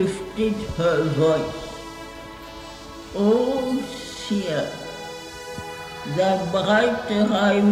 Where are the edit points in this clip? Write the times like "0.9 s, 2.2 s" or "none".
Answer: none